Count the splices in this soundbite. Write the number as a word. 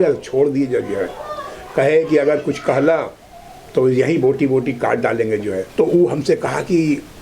one